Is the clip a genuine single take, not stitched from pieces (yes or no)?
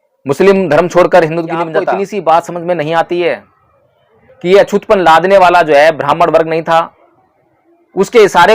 no